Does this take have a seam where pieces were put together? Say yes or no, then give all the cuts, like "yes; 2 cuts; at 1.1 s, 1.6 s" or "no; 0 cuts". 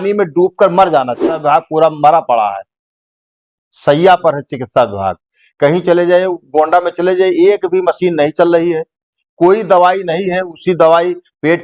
yes; 1 cut; at 1.4 s